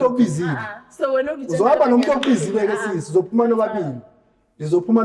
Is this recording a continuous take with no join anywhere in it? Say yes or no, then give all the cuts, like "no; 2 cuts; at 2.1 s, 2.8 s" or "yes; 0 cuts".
yes; 0 cuts